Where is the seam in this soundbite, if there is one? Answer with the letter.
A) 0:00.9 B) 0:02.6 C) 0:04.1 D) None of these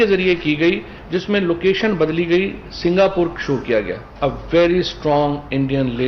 C